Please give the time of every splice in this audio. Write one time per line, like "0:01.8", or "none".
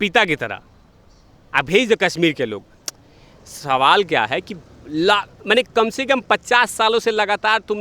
none